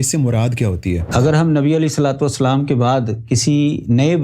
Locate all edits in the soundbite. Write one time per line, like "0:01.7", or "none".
0:01.0